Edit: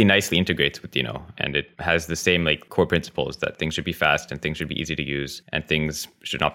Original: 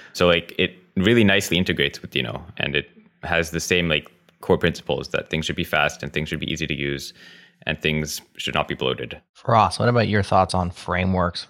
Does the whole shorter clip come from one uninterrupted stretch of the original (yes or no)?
no